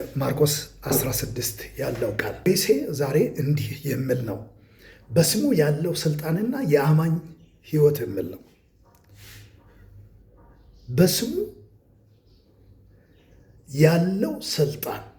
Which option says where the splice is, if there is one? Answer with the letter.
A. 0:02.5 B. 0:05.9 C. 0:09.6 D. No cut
A